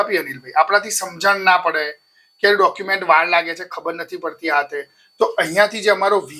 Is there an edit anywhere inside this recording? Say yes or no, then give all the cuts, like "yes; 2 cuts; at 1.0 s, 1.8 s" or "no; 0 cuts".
no; 0 cuts